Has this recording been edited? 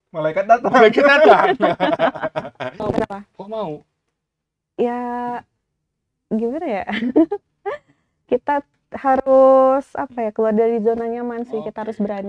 yes; 1 cut; at 2.7 s

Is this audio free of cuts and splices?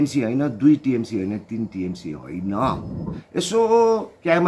no; 1 cut; at 3.1 s

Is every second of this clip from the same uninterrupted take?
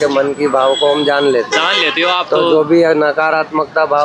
yes; 0 cuts

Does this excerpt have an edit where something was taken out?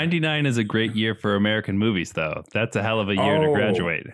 no; 0 cuts

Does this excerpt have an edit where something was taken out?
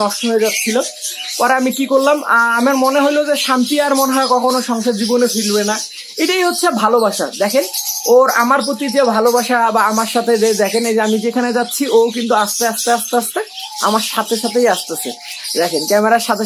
no; 0 cuts

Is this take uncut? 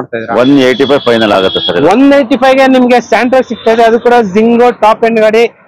yes; 0 cuts

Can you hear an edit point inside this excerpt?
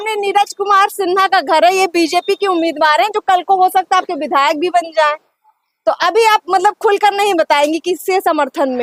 no; 0 cuts

